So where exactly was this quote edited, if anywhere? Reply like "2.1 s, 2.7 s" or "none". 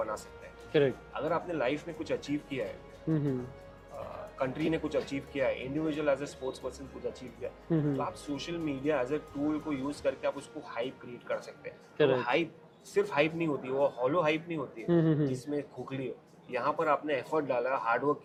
none